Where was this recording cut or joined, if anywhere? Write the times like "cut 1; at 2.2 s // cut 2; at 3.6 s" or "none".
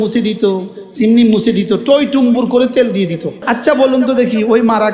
cut 1; at 3.4 s